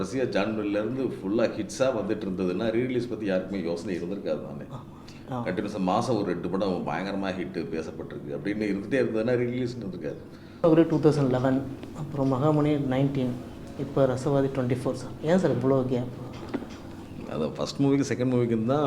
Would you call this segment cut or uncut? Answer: cut